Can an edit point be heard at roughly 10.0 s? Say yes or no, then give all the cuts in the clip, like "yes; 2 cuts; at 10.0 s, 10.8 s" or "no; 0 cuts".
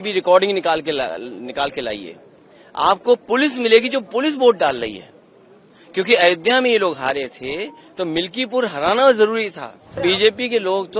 yes; 1 cut; at 10.0 s